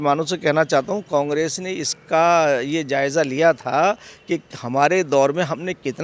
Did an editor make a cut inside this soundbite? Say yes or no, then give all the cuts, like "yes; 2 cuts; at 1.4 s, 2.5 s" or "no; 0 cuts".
no; 0 cuts